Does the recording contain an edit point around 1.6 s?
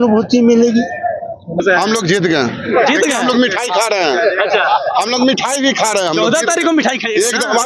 yes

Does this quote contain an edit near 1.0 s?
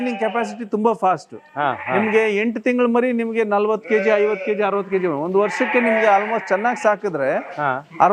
no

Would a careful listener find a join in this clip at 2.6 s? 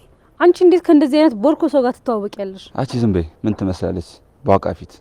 yes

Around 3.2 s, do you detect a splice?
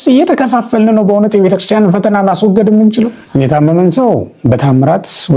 yes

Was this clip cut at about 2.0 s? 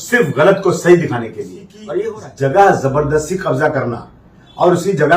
yes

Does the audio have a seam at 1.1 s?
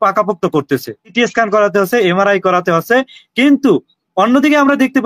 yes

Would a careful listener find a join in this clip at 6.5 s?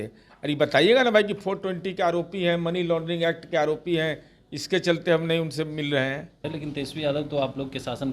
yes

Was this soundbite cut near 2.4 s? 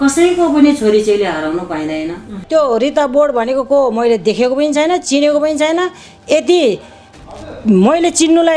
yes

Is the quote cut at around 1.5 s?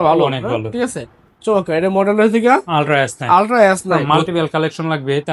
no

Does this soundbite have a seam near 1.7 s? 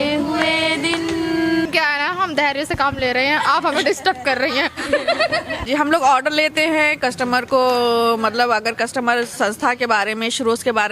yes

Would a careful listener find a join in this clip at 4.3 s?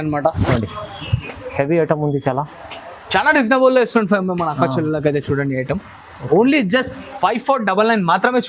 no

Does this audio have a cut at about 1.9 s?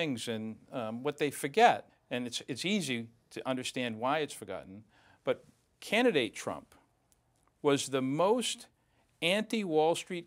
yes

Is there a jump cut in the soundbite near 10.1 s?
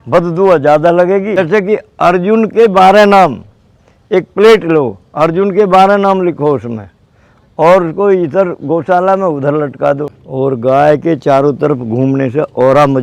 yes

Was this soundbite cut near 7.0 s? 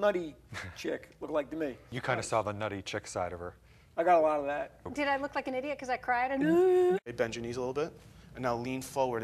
yes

